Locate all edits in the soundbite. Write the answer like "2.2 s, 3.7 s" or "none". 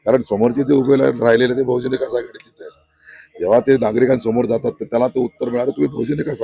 none